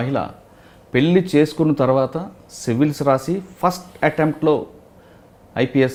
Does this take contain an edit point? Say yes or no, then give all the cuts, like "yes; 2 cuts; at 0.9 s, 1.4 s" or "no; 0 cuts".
no; 0 cuts